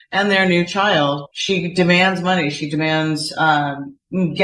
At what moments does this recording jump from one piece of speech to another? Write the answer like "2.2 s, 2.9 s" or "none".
1.3 s

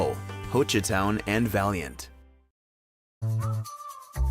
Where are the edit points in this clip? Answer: 3.2 s

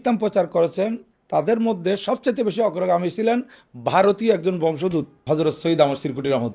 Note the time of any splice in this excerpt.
5.2 s

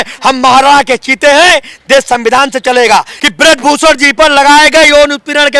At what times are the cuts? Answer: 3.2 s

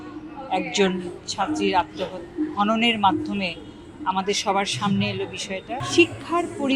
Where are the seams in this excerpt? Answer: 5.8 s

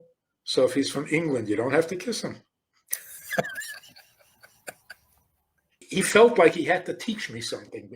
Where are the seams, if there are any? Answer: 5.9 s

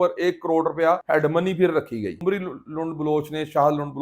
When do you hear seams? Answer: 1.0 s, 2.2 s

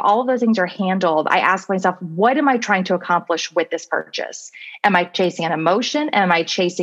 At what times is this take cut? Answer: none

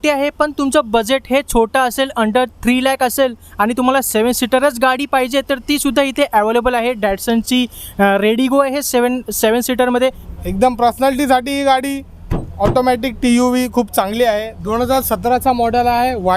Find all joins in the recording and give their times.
10.2 s, 14.5 s

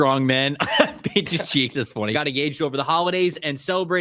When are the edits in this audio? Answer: 2.2 s

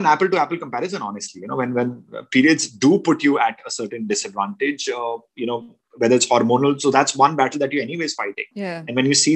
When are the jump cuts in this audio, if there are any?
none

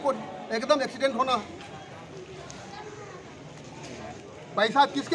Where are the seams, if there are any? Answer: none

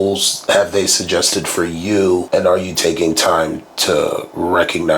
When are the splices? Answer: 2.2 s

